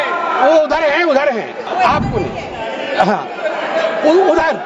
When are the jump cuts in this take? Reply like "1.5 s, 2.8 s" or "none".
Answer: 1.6 s

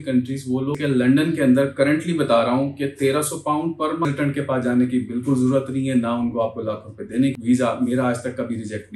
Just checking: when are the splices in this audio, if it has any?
0.8 s, 4.0 s, 7.3 s

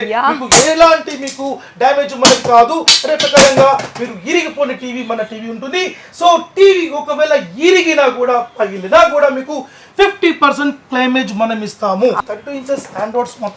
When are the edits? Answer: 12.2 s

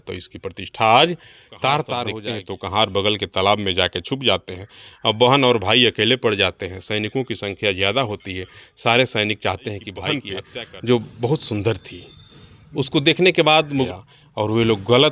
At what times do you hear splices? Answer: 2.2 s, 10.2 s, 13.9 s

